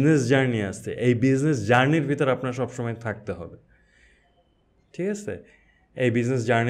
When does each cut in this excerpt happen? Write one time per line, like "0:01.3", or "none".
none